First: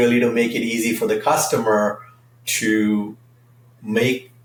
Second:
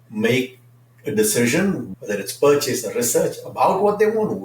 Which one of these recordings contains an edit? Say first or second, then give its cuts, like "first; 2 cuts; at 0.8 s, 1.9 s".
second; 1 cut; at 1.9 s